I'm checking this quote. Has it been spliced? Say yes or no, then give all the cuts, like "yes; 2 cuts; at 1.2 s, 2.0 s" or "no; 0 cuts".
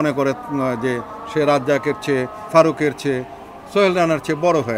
no; 0 cuts